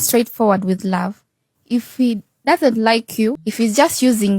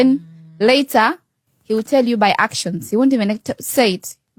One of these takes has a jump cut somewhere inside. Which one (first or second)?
first